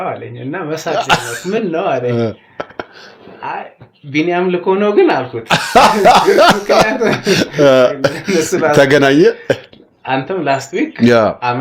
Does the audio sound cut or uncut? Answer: uncut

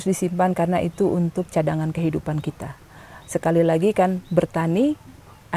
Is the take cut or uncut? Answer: uncut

